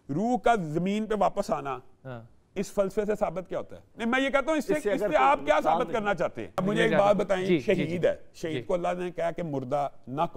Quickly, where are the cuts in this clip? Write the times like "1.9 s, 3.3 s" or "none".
3.8 s, 6.6 s